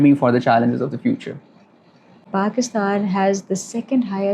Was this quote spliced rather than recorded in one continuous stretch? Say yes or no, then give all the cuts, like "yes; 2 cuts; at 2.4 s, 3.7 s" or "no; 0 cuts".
yes; 1 cut; at 2.2 s